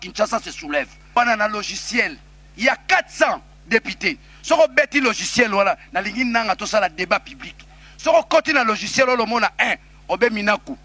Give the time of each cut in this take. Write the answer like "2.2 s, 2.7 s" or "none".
1.2 s

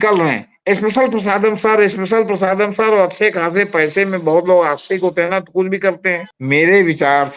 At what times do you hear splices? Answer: 6.3 s

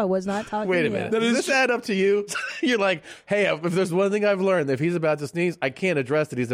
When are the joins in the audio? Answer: 2.3 s

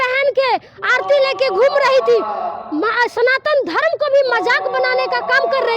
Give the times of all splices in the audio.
none

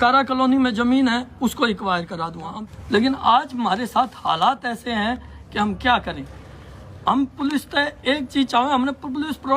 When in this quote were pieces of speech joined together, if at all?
2.5 s

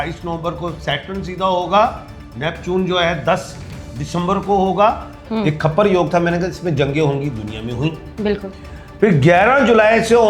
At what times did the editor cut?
5.2 s

